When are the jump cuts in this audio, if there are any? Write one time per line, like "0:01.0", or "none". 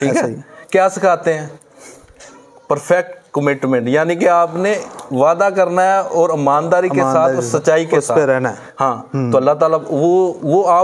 none